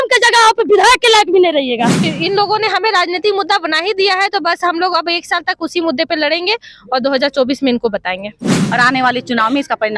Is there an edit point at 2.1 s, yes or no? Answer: yes